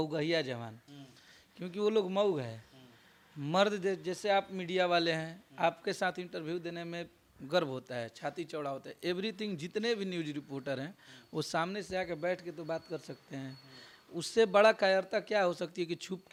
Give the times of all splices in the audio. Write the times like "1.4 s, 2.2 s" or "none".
none